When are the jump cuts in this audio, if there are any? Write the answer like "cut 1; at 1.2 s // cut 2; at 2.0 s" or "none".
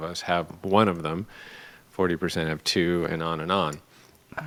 none